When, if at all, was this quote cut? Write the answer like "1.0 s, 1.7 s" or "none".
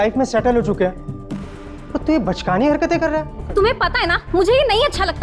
3.4 s